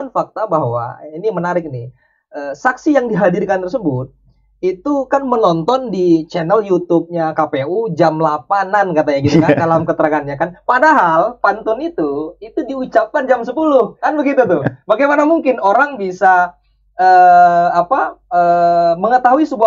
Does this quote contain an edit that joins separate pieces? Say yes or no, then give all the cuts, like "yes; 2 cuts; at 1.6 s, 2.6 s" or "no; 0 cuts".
no; 0 cuts